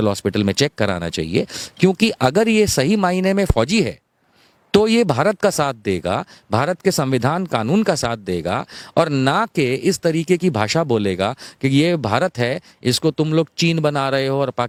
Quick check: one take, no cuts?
yes; 0 cuts

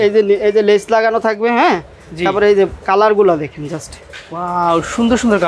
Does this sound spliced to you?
no; 0 cuts

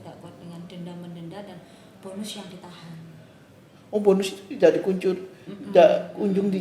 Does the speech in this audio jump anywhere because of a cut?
no; 0 cuts

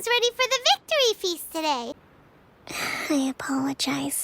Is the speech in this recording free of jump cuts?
no; 1 cut; at 2.0 s

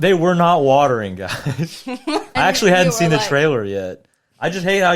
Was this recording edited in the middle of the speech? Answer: yes; 1 cut; at 2.3 s

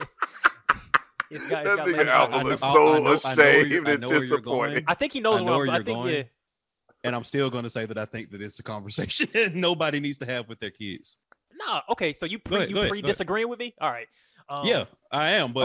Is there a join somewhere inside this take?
yes; 1 cut; at 11.5 s

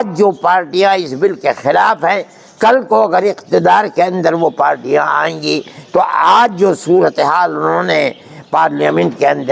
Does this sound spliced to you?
no; 0 cuts

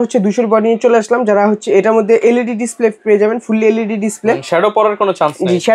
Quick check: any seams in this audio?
no; 0 cuts

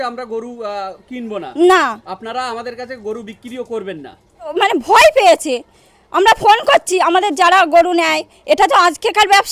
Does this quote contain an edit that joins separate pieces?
yes; 1 cut; at 4.5 s

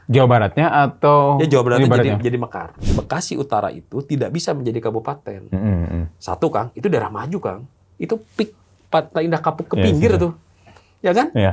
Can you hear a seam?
yes; 1 cut; at 2.8 s

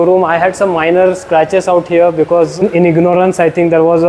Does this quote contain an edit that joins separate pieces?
yes; 1 cut; at 2.6 s

